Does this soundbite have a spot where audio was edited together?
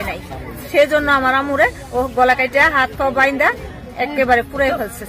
no; 0 cuts

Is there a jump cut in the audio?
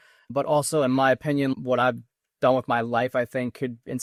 no; 0 cuts

